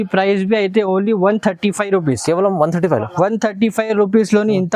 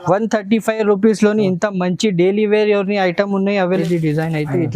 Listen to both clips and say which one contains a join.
second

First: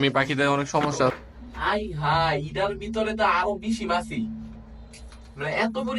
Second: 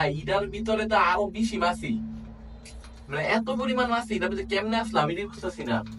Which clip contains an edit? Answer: first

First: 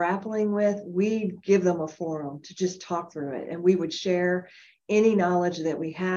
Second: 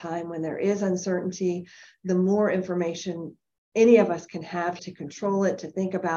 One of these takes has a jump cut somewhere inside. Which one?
second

